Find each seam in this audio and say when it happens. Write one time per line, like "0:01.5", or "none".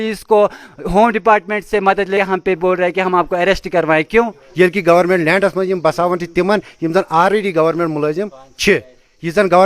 0:02.1
0:04.3